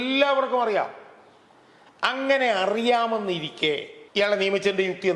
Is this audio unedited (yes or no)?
no